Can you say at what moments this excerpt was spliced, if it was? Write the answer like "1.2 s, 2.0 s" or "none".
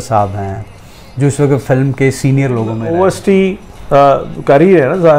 2.8 s